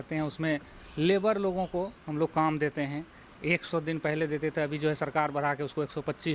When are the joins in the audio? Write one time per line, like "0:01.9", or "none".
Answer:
none